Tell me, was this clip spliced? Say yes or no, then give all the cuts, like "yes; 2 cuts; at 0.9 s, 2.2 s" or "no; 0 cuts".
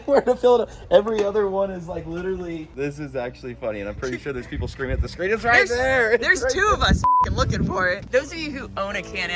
yes; 2 cuts; at 2.6 s, 8.0 s